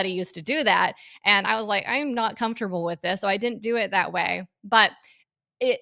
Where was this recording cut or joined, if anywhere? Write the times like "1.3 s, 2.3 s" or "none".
none